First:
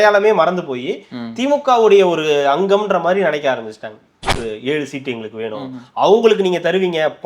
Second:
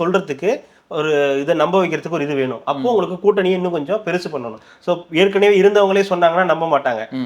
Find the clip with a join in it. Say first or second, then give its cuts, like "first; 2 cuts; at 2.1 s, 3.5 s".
first; 1 cut; at 4.3 s